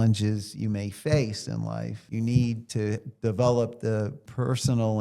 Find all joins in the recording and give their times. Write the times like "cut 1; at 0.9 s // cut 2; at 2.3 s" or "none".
cut 1; at 2.0 s // cut 2; at 2.7 s

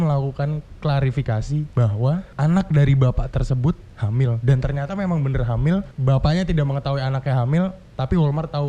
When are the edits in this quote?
cut 1; at 2.3 s // cut 2; at 5.9 s

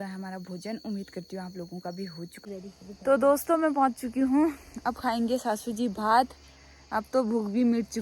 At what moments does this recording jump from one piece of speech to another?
cut 1; at 2.3 s

